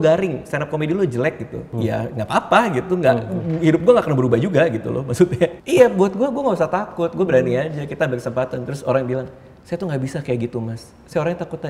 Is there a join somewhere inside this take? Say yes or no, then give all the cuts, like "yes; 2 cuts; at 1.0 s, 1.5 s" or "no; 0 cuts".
yes; 2 cuts; at 1.7 s, 5.6 s